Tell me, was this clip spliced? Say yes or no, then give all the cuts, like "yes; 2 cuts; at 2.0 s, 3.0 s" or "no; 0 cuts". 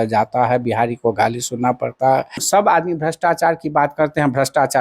yes; 1 cut; at 2.4 s